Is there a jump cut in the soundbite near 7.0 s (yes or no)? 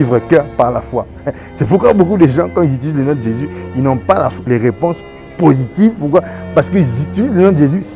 no